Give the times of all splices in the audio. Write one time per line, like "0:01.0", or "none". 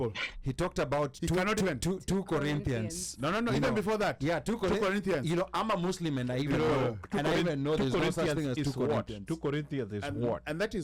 none